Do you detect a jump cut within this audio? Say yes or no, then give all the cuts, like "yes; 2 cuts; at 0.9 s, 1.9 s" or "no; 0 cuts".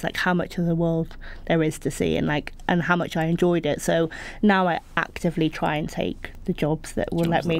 no; 0 cuts